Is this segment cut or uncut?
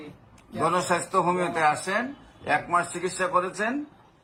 uncut